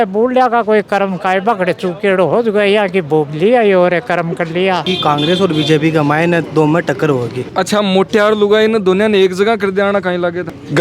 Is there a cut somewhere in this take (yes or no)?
yes